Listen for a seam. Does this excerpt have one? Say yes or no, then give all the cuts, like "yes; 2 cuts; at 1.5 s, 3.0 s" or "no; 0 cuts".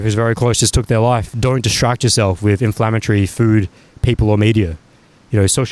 yes; 1 cut; at 1.3 s